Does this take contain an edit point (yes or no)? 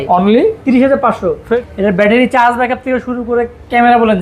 yes